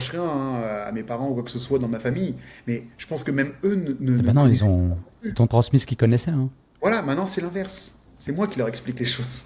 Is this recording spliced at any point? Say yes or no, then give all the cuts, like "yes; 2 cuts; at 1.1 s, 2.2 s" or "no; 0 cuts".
no; 0 cuts